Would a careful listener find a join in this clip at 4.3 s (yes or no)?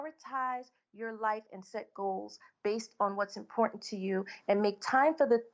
no